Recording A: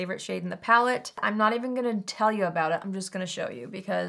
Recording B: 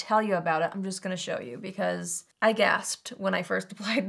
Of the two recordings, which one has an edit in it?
A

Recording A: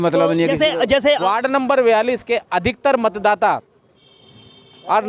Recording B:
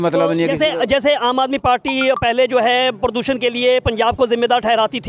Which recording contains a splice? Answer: A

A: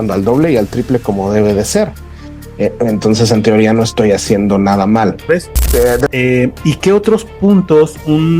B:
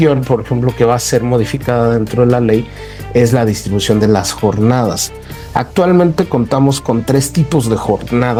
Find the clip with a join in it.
A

